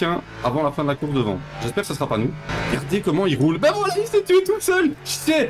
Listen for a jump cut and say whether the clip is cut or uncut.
cut